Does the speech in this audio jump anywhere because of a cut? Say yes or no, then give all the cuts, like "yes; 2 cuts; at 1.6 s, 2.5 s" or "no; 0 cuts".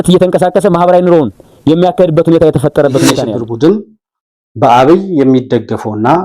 yes; 1 cut; at 3.3 s